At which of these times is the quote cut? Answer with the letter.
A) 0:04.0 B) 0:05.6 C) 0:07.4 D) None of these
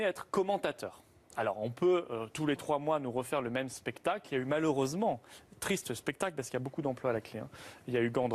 D